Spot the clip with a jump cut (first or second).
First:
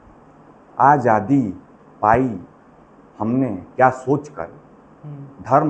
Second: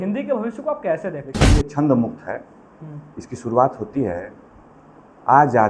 second